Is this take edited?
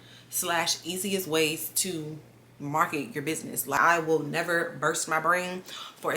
yes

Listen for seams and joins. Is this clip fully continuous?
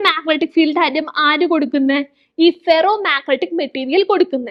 yes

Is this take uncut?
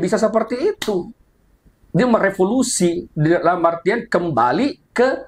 yes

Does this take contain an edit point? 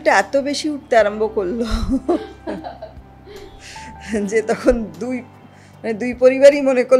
no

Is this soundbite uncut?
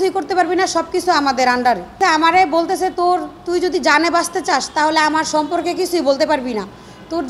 no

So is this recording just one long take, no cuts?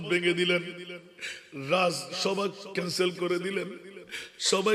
yes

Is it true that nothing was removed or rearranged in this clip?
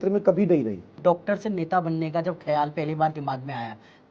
no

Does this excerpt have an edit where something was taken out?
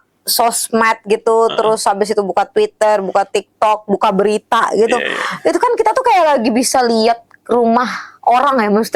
no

